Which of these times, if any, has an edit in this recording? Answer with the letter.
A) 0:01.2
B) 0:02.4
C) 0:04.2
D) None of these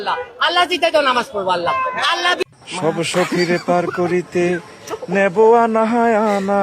B